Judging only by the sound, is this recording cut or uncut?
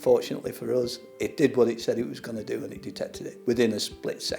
cut